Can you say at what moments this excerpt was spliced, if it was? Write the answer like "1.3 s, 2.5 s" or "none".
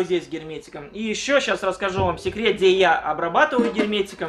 none